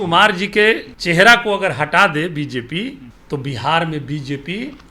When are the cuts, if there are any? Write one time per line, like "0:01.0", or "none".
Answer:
0:00.9
0:03.1